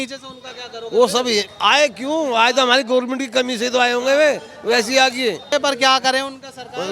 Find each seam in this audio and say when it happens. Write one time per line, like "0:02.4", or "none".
0:05.5